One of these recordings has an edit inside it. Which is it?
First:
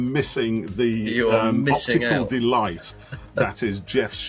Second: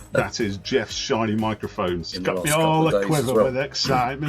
second; 1 cut; at 2.1 s

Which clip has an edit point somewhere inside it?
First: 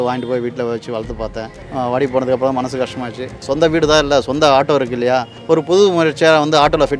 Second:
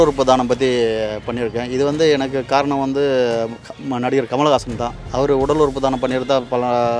first; 3 cuts; at 1.6 s, 3.4 s, 5.3 s

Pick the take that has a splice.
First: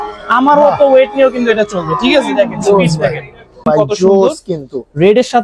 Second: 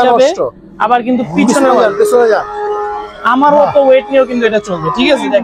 first; 1 cut; at 3.6 s

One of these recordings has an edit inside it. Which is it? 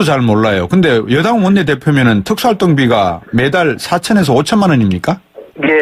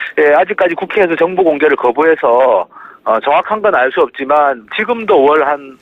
first; 1 cut; at 3.8 s

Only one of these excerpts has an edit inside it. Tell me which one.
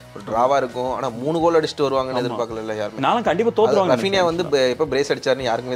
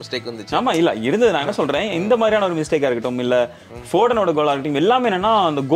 second; 1 cut; at 3.6 s

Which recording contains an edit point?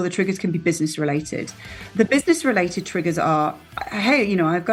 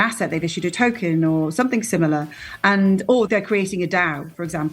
second; 1 cut; at 3.3 s

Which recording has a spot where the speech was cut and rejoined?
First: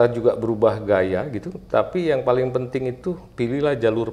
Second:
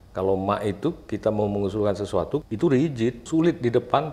second; 2 cuts; at 2.4 s, 3.2 s

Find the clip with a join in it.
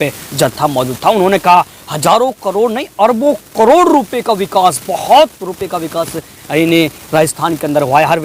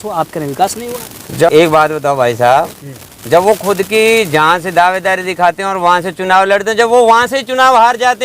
second; 1 cut; at 1.5 s

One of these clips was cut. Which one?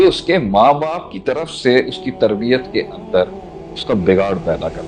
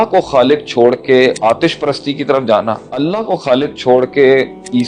second; 2 cuts; at 1.4 s, 3.0 s

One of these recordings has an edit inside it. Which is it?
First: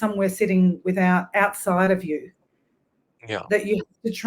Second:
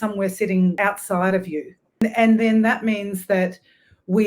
second; 2 cuts; at 0.8 s, 2.0 s

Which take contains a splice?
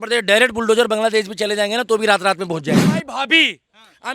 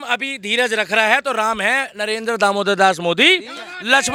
first; 1 cut; at 2.9 s

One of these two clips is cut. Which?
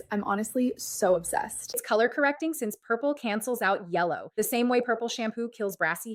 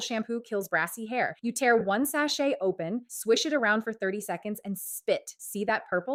first; 1 cut; at 1.8 s

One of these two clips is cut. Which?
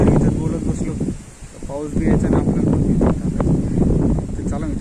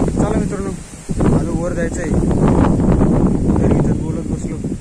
first; 1 cut; at 3.7 s

